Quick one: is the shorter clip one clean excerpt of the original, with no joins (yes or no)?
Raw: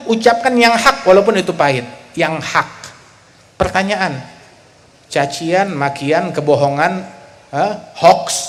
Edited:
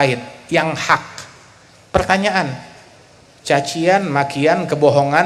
yes